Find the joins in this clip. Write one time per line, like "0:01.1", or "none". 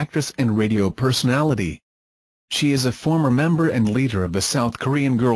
none